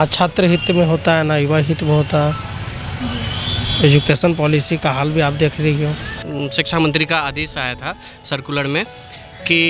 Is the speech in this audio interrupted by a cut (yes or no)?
yes